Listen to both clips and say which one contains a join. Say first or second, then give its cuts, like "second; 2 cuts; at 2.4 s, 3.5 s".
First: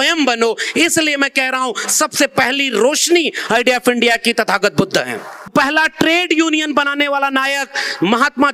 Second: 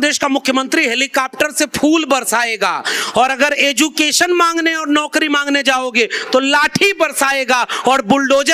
first; 1 cut; at 5.5 s